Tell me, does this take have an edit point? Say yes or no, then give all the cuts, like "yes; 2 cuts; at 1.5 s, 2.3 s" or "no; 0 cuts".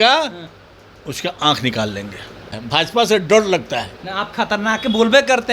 yes; 1 cut; at 2.6 s